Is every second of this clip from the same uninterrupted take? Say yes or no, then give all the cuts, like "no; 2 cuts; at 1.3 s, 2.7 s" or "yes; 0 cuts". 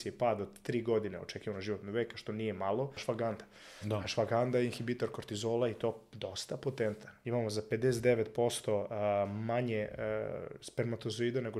no; 2 cuts; at 3.0 s, 7.1 s